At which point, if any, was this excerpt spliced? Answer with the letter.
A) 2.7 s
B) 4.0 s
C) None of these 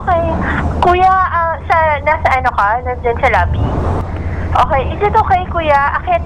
B